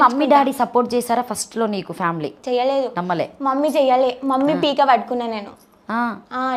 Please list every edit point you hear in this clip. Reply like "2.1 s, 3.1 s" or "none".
2.4 s